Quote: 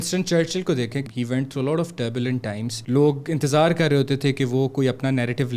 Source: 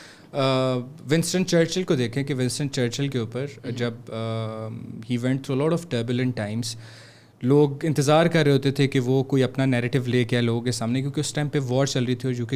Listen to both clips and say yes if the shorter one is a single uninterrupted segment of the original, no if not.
no